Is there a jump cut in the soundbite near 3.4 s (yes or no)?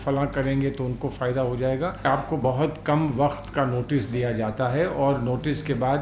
no